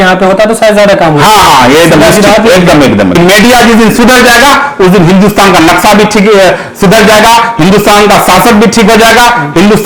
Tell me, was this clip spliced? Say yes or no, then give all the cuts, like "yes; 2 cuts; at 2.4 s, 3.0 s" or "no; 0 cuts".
yes; 1 cut; at 3.2 s